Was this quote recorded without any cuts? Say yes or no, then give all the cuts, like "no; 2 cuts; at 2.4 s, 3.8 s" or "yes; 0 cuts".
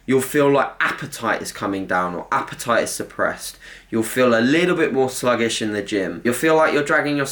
no; 1 cut; at 6.2 s